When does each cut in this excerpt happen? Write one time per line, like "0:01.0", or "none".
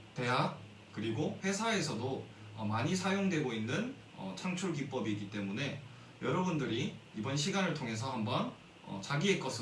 none